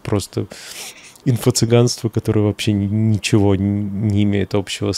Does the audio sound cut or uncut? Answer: uncut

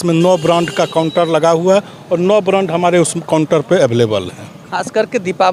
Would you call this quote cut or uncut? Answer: uncut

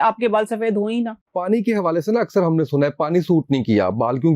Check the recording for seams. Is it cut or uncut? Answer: cut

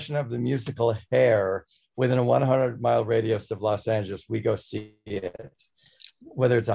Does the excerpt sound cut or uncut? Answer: uncut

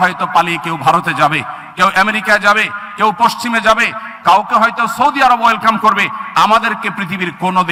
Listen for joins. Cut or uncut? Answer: uncut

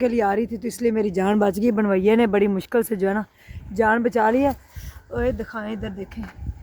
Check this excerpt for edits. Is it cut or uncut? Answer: uncut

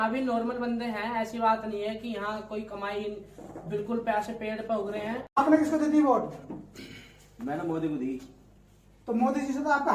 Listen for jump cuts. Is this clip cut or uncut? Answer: cut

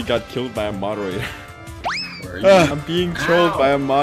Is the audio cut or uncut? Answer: cut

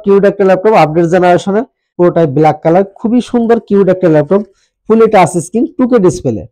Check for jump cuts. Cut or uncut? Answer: cut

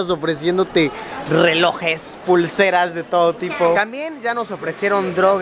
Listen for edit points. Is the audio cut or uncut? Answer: uncut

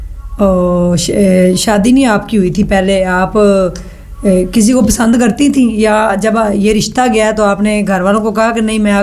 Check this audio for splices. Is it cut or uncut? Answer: uncut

